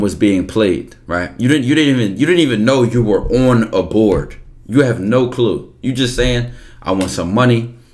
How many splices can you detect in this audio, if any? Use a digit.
0